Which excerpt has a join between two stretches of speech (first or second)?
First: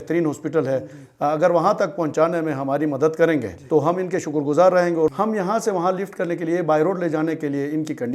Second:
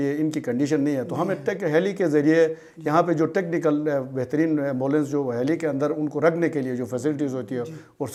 first